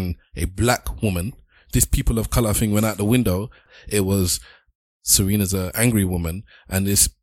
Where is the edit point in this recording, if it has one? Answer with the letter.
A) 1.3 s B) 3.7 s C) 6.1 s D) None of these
B